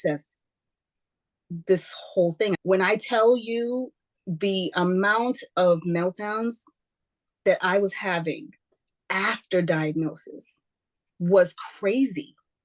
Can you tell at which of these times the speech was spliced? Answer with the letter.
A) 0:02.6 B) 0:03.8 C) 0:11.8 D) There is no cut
A